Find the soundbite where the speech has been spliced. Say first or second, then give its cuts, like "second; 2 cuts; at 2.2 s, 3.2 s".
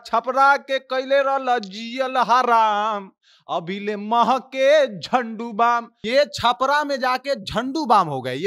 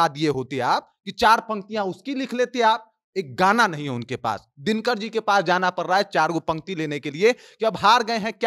first; 1 cut; at 5.9 s